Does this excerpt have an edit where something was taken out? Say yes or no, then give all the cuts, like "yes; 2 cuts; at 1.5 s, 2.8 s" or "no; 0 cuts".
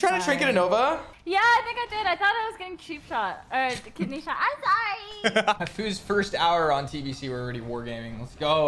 yes; 2 cuts; at 1.1 s, 5.6 s